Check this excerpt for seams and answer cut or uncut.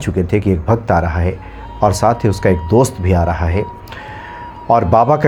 uncut